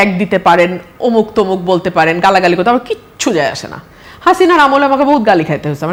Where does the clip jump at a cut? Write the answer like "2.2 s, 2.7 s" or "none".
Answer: none